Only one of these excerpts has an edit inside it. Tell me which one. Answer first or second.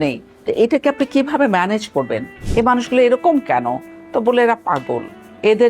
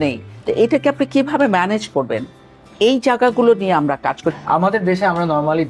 first